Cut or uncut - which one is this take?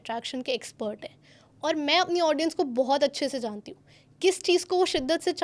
uncut